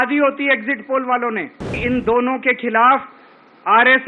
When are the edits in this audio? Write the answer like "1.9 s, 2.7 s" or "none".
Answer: 1.7 s